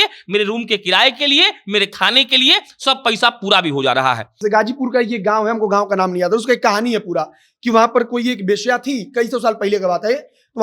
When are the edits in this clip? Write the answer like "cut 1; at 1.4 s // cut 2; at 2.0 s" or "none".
cut 1; at 4.4 s